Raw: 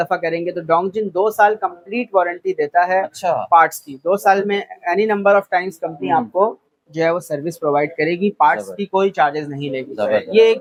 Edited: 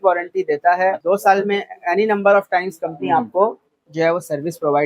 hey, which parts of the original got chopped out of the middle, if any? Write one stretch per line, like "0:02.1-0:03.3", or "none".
0:03.1-0:04.0